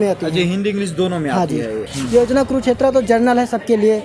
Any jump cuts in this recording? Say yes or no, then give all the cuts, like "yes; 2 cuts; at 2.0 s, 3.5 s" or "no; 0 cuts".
yes; 1 cut; at 1.9 s